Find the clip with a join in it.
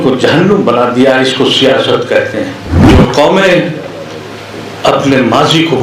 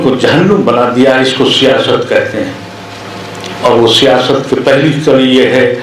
first; 1 cut; at 2.7 s

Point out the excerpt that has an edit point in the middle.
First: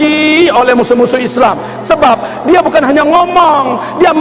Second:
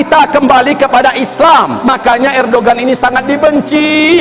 second; 1 cut; at 1.7 s

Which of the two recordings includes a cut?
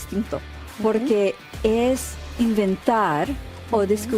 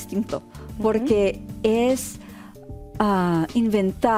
first; 1 cut; at 2.3 s

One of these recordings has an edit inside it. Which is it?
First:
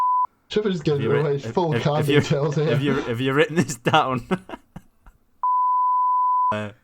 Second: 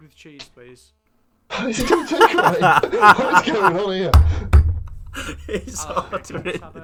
first; 1 cut; at 5.4 s

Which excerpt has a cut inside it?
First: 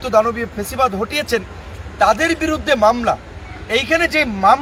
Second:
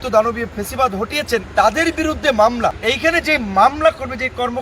second; 2 cuts; at 1.5 s, 2.8 s

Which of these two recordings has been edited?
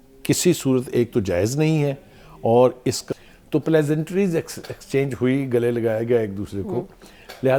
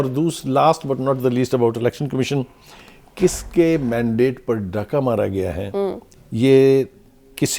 first; 1 cut; at 3.0 s

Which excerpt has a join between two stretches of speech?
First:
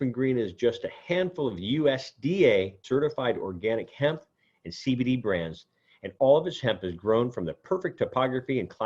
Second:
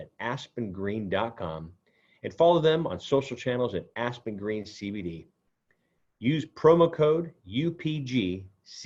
first; 1 cut; at 2.8 s

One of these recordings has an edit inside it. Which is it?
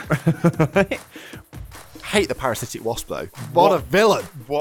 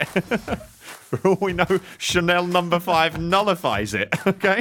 first; 2 cuts; at 1.4 s, 3.4 s

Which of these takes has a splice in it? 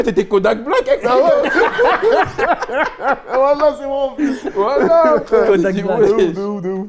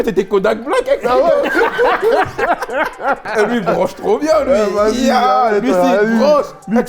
second; 1 cut; at 3.3 s

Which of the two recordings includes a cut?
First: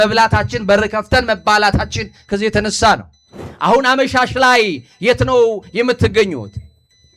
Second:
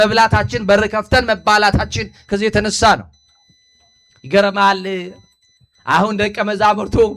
first; 1 cut; at 3.4 s

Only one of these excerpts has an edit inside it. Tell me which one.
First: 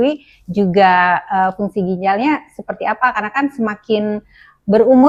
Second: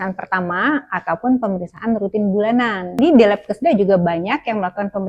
second; 1 cut; at 3.0 s

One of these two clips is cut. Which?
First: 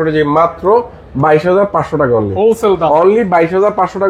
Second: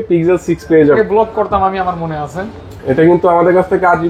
second; 1 cut; at 1.0 s

